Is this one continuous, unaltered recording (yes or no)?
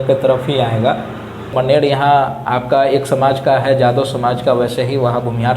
no